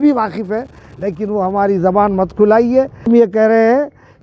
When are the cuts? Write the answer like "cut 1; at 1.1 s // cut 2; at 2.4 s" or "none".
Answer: cut 1; at 3.1 s